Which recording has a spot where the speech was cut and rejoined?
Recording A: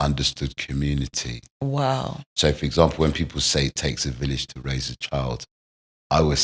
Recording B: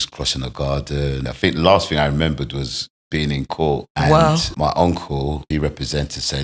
B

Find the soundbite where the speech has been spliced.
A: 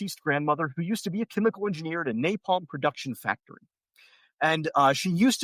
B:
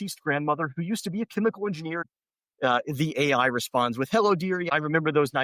B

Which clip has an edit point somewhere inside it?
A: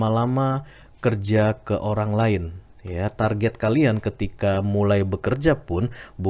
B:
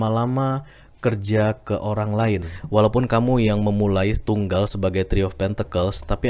B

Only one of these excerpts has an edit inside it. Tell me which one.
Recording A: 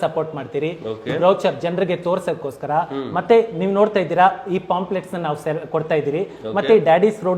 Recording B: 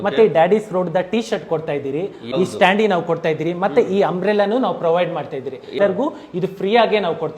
B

